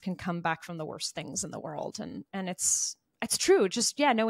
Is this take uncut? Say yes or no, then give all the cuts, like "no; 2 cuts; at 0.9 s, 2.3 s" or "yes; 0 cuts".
yes; 0 cuts